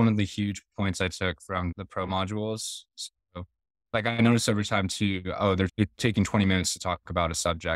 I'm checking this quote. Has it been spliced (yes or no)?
yes